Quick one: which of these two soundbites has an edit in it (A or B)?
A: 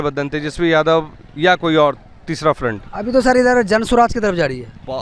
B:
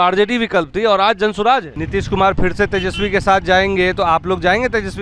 B